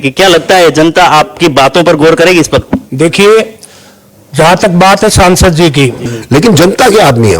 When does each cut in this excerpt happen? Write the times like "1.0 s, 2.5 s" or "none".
6.0 s